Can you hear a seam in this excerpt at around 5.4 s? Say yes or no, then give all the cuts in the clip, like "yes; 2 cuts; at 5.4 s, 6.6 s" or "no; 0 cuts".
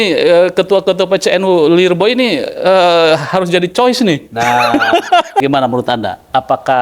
yes; 1 cut; at 5.4 s